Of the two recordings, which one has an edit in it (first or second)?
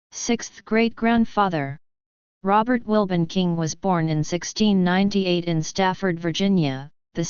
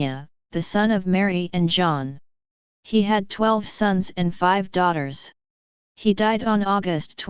first